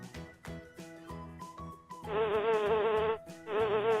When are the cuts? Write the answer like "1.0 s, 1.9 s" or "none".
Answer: 2.1 s